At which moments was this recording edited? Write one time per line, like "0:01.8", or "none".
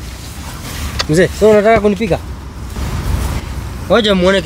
0:02.7